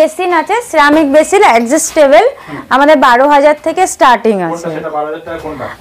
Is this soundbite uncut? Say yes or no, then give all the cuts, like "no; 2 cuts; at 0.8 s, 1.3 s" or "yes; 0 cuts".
yes; 0 cuts